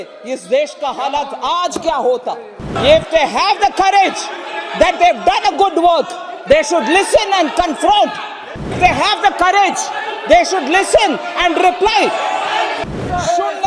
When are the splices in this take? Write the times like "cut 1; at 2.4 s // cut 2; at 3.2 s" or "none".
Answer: cut 1; at 2.7 s // cut 2; at 8.7 s // cut 3; at 12.8 s